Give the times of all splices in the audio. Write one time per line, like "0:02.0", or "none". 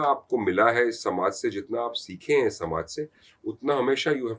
none